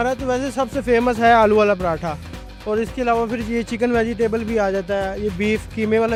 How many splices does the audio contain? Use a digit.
0